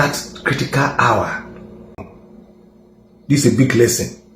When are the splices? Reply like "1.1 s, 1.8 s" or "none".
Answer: 2.0 s